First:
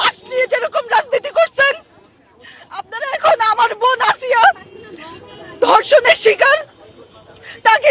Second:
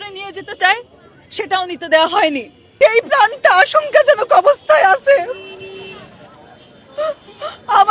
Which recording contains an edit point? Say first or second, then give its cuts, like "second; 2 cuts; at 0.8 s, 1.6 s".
second; 1 cut; at 2.6 s